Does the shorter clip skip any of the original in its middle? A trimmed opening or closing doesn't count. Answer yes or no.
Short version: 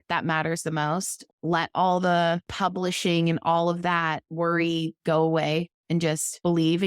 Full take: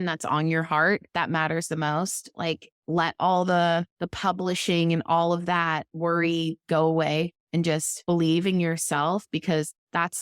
yes